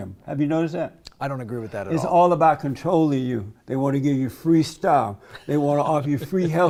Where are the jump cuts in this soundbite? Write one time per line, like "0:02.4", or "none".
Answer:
none